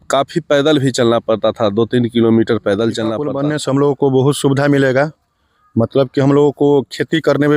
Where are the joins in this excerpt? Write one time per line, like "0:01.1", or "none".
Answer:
0:03.3